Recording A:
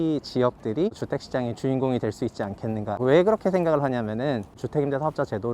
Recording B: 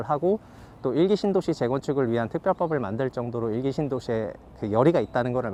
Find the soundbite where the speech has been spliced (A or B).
A